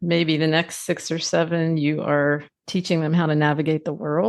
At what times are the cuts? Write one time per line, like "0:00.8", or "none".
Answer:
0:02.6